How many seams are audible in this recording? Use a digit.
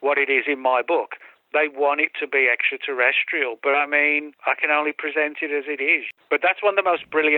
2